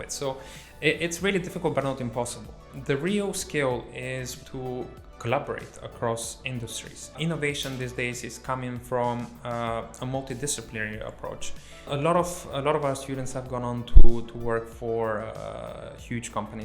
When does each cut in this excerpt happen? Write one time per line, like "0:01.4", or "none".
0:02.7
0:04.3
0:07.2
0:11.9